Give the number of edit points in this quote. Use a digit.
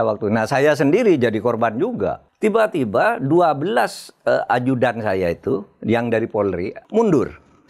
2